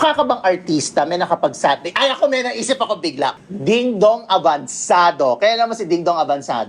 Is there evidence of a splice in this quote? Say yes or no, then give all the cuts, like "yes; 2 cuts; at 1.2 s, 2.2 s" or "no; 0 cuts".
yes; 1 cut; at 3.3 s